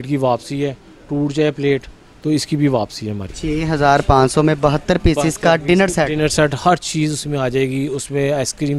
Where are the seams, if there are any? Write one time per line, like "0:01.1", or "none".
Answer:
0:03.3